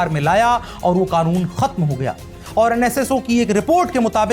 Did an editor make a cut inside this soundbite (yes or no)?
yes